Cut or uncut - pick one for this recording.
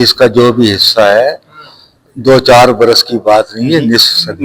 uncut